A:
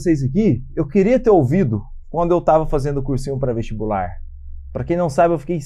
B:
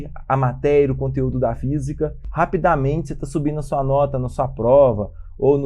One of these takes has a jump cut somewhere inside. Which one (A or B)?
B